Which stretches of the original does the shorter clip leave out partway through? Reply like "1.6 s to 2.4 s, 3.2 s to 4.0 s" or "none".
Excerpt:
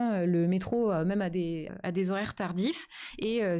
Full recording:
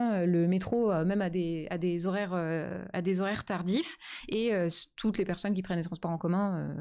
1.7 s to 2.8 s